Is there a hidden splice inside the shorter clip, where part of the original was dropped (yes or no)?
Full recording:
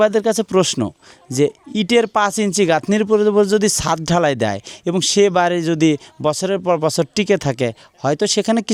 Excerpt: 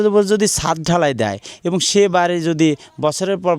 no